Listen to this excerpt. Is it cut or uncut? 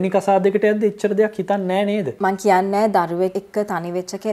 cut